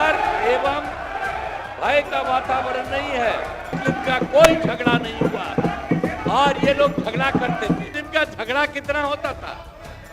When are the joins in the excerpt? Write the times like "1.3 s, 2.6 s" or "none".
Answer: 3.8 s, 7.9 s

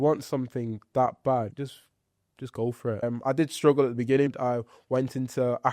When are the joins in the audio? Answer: 1.5 s, 3.0 s, 4.3 s

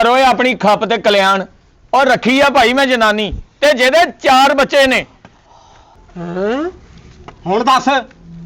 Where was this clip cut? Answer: none

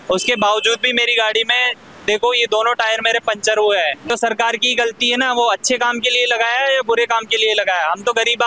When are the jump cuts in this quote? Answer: 4.1 s

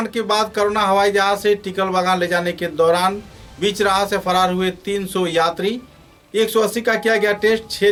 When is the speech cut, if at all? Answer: none

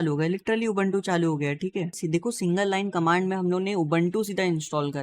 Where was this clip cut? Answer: 1.9 s

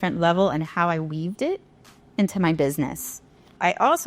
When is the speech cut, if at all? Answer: 3.2 s

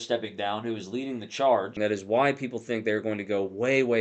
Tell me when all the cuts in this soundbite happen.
1.8 s

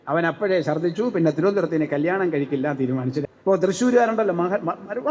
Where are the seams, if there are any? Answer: 3.2 s

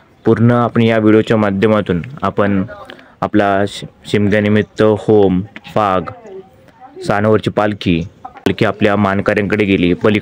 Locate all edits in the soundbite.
8.5 s

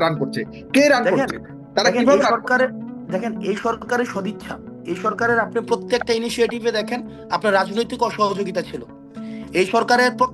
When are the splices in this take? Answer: none

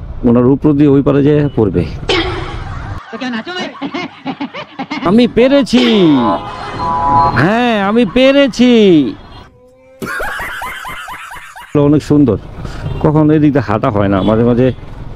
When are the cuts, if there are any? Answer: 5.1 s, 11.8 s

